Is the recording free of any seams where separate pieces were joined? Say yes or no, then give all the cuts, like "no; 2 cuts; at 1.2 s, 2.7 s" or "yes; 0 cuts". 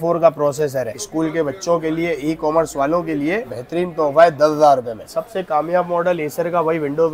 no; 3 cuts; at 0.9 s, 3.5 s, 5.1 s